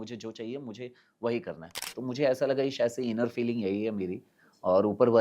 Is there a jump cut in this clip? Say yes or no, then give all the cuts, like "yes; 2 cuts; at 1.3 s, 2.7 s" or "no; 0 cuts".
yes; 1 cut; at 1.9 s